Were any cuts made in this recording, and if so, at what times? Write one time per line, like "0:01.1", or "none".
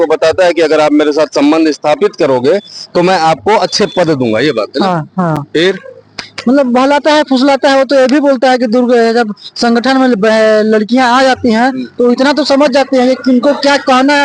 none